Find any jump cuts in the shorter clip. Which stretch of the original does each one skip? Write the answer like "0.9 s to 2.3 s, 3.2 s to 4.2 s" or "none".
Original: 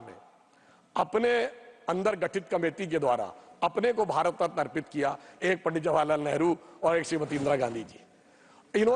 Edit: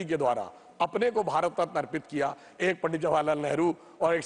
none